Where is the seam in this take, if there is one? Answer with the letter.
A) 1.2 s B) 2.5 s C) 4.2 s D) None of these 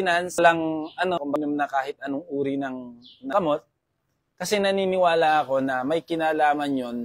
A